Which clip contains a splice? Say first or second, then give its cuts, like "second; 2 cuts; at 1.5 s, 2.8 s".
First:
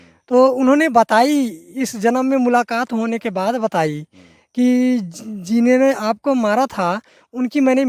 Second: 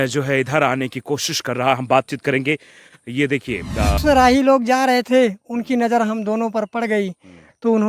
second; 1 cut; at 4.0 s